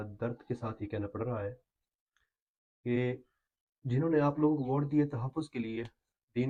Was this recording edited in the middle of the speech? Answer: no; 0 cuts

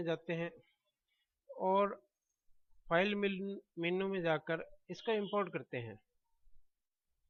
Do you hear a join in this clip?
no; 0 cuts

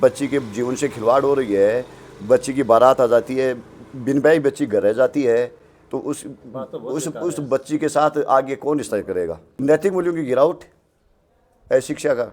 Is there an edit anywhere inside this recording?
no; 0 cuts

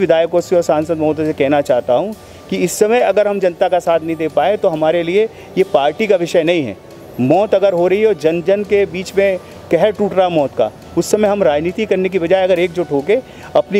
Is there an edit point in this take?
no; 0 cuts

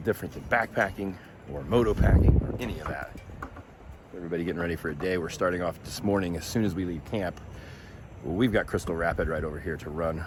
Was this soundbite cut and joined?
no; 0 cuts

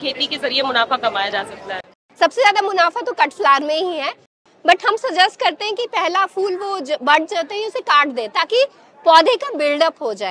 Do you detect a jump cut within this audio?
yes; 2 cuts; at 2.0 s, 4.3 s

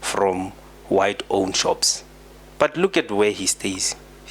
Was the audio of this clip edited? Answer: no; 0 cuts

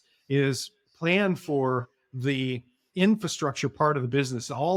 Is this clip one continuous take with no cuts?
yes; 0 cuts

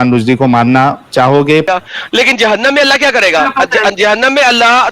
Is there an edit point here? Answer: yes; 1 cut; at 1.7 s

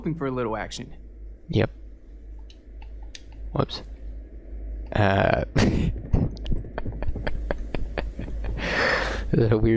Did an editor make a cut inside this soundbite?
no; 0 cuts

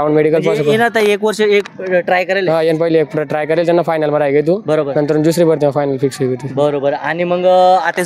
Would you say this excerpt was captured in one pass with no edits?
yes; 0 cuts

